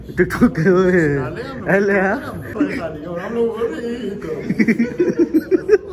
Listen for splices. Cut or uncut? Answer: cut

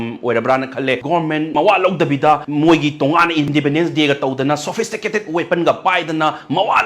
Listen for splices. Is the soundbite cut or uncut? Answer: cut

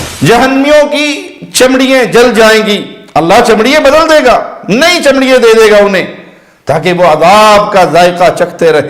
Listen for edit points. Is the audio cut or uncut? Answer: uncut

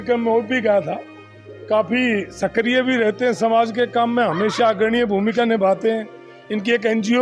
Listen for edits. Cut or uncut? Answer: uncut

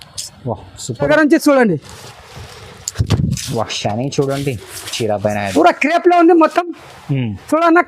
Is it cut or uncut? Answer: cut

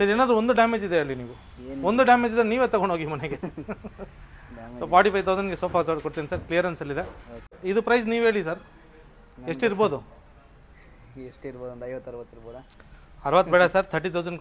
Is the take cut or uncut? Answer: cut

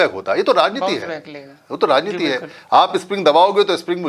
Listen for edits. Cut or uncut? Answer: uncut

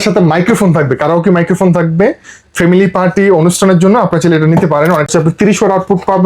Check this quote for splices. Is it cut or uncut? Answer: cut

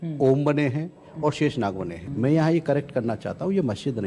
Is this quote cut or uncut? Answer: cut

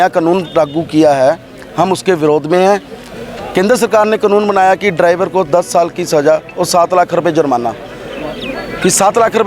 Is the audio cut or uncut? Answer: uncut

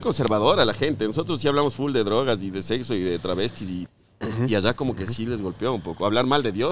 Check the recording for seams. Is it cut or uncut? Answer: cut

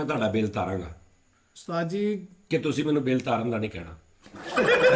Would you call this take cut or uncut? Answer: uncut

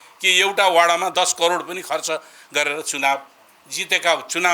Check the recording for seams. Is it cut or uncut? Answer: uncut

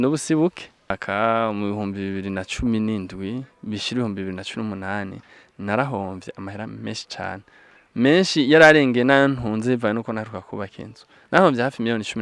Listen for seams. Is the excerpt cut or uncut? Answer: cut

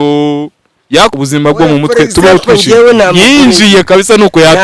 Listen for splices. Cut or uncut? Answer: cut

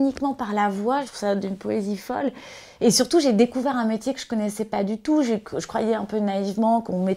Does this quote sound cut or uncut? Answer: cut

